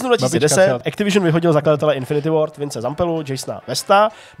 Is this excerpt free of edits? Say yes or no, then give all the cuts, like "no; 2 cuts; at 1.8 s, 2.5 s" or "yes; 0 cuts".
no; 1 cut; at 0.9 s